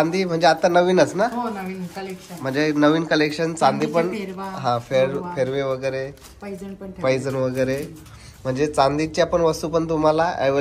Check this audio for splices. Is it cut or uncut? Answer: uncut